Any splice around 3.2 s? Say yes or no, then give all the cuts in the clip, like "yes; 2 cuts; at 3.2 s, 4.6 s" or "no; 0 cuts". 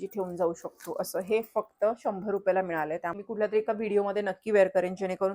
yes; 1 cut; at 3.2 s